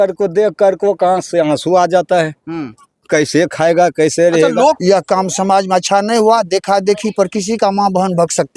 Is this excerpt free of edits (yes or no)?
no